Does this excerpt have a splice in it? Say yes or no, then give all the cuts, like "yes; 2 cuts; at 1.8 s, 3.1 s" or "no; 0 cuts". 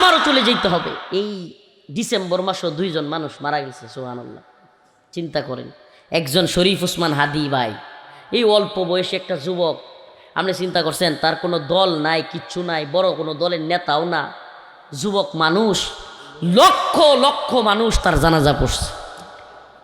yes; 1 cut; at 1.0 s